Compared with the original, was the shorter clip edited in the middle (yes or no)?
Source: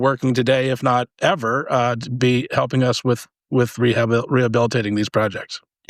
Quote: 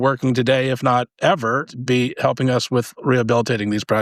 yes